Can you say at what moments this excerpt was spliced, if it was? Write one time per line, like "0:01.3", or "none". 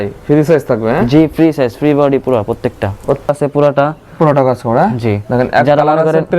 0:03.3

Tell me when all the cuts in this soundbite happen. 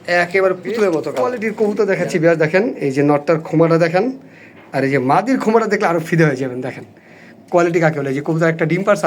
0:01.4

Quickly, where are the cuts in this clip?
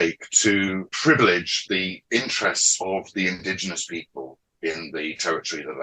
0:00.9
0:01.5

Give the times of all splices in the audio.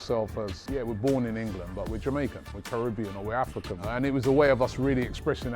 0:02.5
0:03.8

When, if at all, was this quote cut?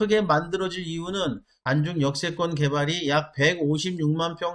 0:01.5

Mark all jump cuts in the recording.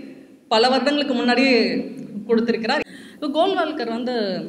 0:02.9

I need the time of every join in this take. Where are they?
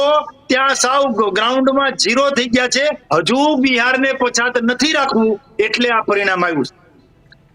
0:03.0

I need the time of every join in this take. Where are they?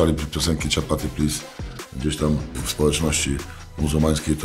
0:02.6

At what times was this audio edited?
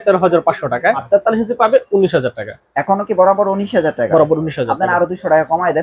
0:01.0

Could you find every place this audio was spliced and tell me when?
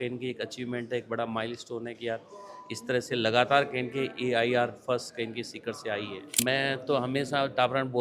0:06.4

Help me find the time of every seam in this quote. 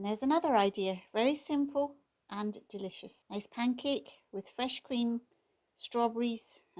0:03.1

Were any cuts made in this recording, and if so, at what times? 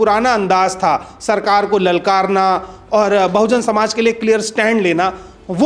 none

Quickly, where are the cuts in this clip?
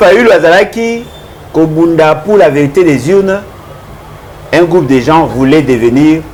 none

